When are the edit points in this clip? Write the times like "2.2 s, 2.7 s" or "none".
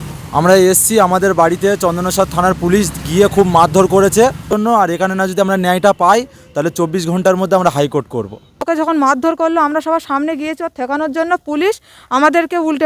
4.5 s, 8.6 s